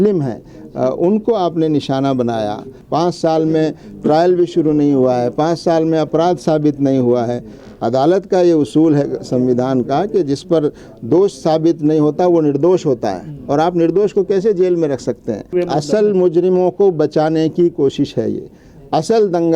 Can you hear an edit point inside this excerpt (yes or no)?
yes